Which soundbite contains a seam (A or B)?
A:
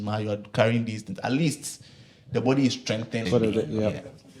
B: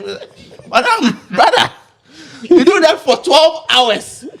A